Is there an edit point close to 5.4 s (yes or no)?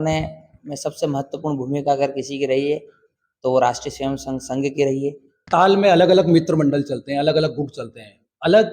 yes